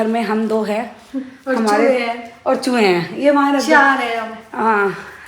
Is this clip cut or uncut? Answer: uncut